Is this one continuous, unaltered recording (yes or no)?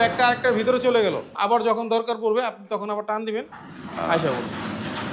no